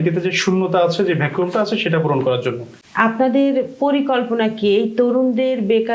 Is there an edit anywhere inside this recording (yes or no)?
yes